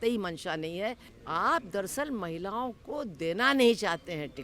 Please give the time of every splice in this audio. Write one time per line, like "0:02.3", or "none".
0:01.1

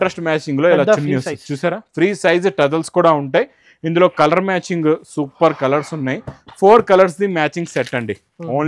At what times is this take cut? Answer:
none

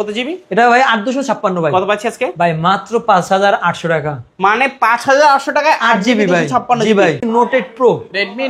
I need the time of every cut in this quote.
0:07.2

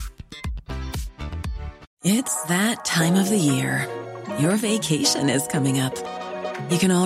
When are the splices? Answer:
0:01.8

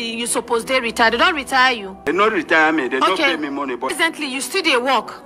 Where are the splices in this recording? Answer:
0:02.1
0:03.9

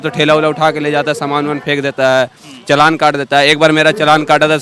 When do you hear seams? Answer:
none

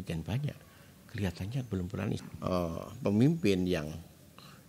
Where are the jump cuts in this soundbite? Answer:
0:02.1

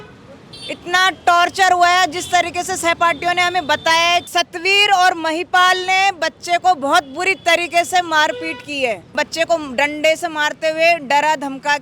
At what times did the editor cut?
0:04.3
0:09.2

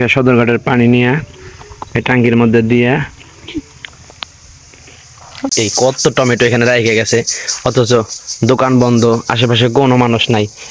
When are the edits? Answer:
none

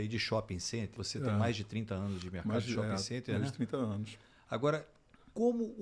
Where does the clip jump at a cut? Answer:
0:01.0

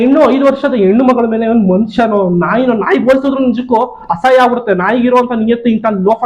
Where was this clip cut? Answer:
none

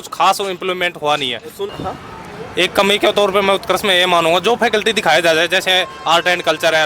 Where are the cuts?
0:01.7

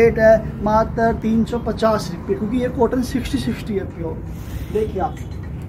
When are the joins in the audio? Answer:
none

